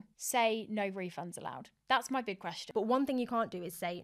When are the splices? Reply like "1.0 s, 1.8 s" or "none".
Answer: 2.6 s

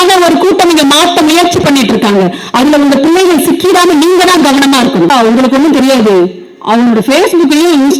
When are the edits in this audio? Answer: 5.1 s

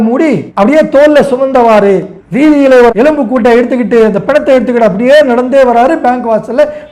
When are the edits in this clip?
2.9 s

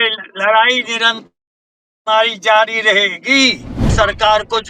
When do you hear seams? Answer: 3.8 s

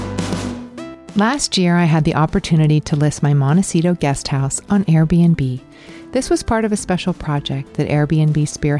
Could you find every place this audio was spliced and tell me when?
1.0 s

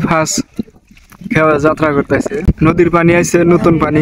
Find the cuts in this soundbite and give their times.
2.5 s

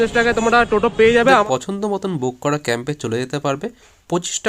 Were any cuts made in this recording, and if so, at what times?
1.3 s

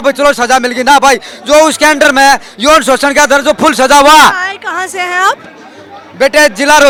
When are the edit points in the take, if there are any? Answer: none

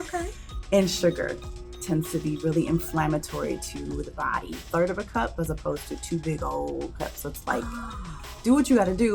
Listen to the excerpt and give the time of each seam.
4.7 s

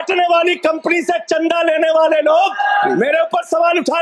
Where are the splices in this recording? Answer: none

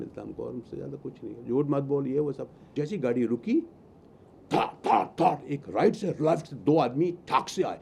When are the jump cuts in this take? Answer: 2.7 s

